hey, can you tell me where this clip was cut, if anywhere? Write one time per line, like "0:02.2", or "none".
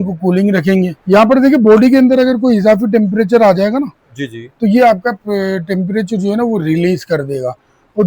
0:01.0